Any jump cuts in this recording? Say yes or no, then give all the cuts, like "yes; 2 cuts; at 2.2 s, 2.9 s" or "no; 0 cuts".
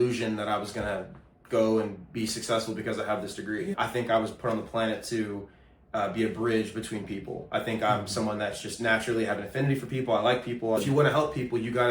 yes; 2 cuts; at 3.7 s, 10.8 s